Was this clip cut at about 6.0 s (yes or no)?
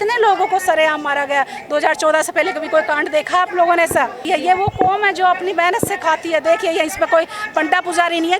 no